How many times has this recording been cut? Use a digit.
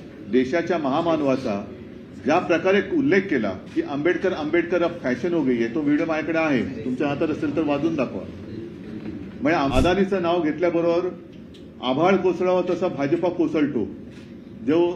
1